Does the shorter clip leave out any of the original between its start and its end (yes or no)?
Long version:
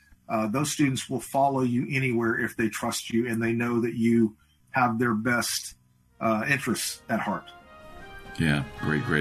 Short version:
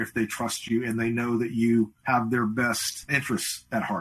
yes